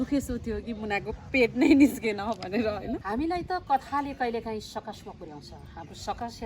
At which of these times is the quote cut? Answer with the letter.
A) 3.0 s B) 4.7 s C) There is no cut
A